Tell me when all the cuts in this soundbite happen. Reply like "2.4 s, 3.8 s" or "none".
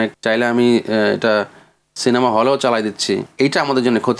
3.3 s